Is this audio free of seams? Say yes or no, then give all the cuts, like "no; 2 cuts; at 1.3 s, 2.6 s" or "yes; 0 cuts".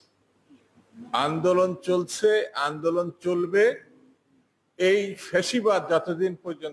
yes; 0 cuts